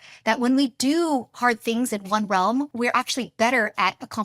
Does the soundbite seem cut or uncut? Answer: cut